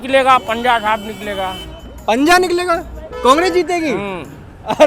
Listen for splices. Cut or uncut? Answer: uncut